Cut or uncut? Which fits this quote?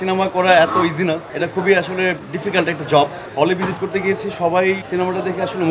cut